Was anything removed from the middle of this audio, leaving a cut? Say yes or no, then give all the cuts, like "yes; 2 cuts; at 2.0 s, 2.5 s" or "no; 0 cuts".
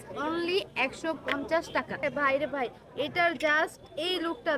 no; 0 cuts